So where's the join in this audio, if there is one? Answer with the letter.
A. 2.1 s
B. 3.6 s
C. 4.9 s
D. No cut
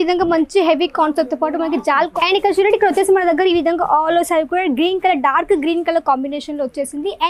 A